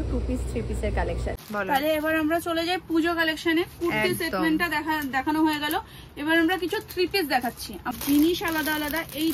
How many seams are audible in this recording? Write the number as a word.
two